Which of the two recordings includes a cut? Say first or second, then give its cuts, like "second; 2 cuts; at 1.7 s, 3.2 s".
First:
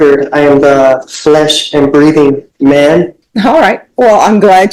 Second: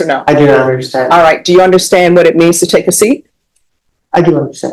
first; 1 cut; at 3.2 s